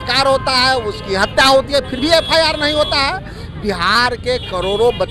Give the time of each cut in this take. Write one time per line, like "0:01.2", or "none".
none